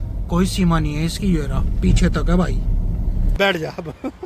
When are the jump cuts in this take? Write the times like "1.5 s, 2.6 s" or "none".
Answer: 3.2 s